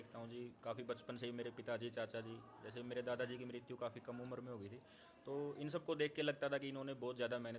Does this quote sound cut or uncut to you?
uncut